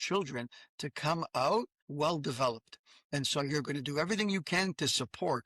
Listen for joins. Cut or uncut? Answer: cut